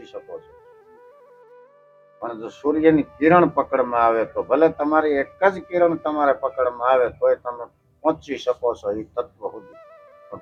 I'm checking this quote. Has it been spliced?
no; 0 cuts

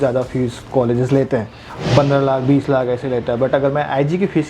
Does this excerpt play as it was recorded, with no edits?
yes; 0 cuts

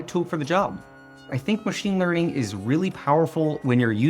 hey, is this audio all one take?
no; 1 cut; at 1.3 s

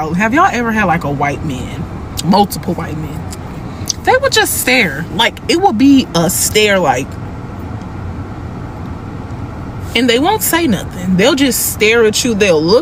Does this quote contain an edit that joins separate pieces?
no; 0 cuts

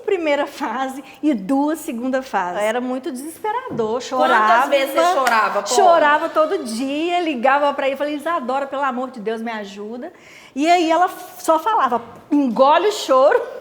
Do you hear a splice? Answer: yes; 1 cut; at 2.6 s

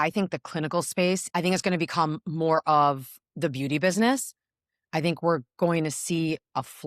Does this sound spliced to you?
yes; 1 cut; at 1.2 s

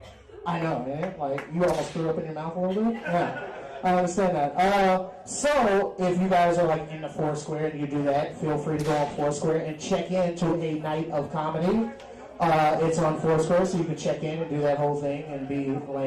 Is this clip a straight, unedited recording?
no; 1 cut; at 10.5 s

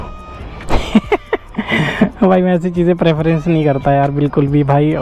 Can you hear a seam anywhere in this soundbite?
no; 0 cuts

